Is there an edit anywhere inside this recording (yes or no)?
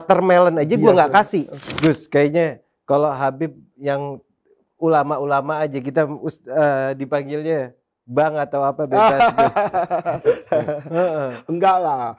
yes